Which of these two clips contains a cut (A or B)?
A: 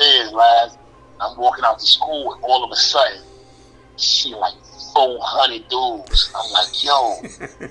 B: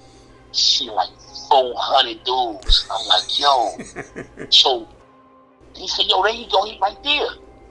B